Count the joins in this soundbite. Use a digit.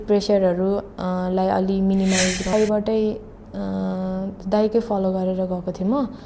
1